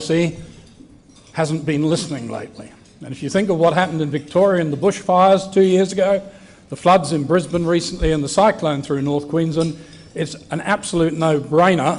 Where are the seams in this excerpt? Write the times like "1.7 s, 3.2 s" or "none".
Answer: 9.3 s